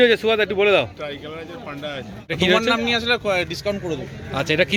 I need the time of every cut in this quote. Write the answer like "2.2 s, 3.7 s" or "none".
2.3 s